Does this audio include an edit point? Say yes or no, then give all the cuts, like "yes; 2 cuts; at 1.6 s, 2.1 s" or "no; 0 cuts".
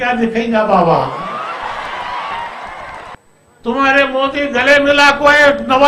yes; 1 cut; at 3.1 s